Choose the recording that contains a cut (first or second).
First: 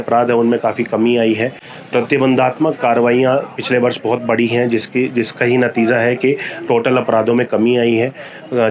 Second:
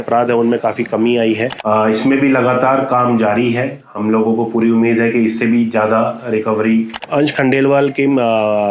second